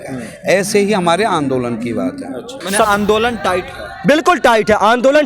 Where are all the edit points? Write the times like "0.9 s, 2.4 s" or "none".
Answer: 2.6 s

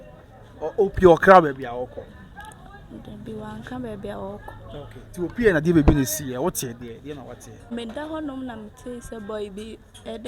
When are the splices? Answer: 7.7 s

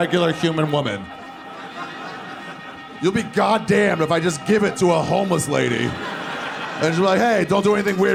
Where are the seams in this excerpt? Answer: none

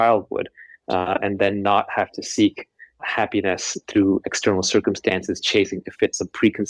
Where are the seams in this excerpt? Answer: 3.0 s

